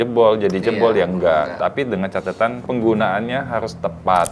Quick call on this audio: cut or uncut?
uncut